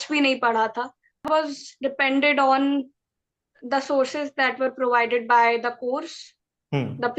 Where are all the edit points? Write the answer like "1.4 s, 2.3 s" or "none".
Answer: 1.3 s